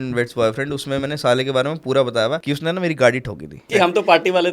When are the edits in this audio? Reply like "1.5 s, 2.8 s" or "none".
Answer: 2.4 s, 3.6 s